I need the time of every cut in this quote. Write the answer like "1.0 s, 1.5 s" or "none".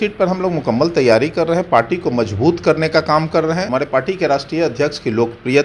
3.7 s